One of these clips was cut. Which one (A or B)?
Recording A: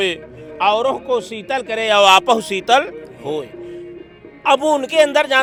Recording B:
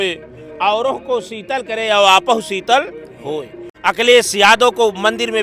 B